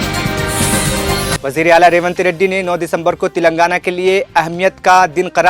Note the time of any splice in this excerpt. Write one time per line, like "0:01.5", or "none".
none